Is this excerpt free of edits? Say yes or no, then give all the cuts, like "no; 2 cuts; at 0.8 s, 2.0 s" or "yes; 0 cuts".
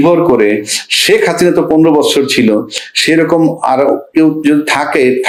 yes; 0 cuts